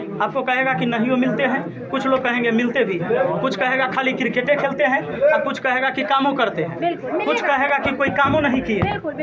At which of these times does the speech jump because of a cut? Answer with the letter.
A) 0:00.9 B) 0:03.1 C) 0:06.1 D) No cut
D